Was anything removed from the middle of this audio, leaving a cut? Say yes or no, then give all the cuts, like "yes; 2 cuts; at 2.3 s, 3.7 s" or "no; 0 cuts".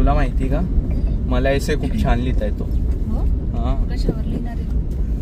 no; 0 cuts